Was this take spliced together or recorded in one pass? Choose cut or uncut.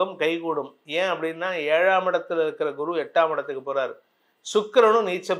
uncut